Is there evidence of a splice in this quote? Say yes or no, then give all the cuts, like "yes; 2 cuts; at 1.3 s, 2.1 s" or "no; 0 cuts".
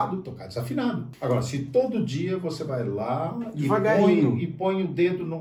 yes; 1 cut; at 1.1 s